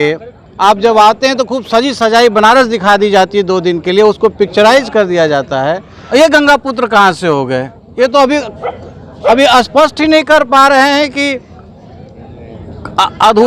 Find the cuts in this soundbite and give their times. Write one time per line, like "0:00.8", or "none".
0:05.9